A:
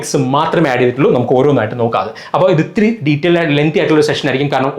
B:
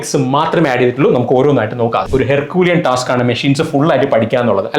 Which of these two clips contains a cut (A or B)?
B